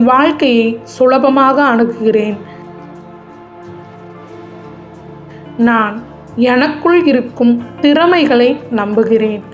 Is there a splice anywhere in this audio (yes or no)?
no